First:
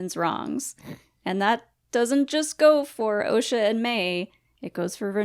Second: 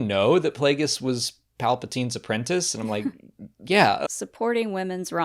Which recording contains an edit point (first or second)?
second